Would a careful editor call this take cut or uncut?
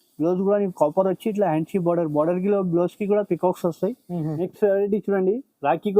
cut